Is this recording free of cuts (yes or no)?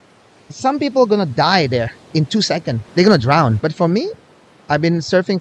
no